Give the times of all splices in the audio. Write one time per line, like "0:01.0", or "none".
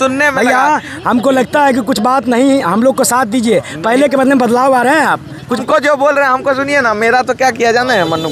none